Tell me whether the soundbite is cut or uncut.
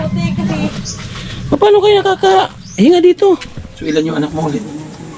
cut